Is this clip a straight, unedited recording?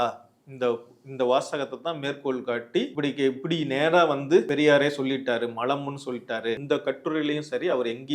no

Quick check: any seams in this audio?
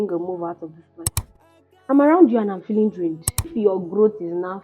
yes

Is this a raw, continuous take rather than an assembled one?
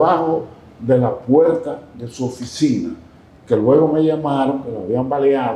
yes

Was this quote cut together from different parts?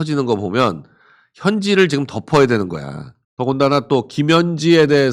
yes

